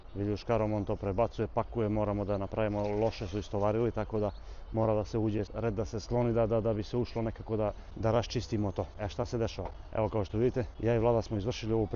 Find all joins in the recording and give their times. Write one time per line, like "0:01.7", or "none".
none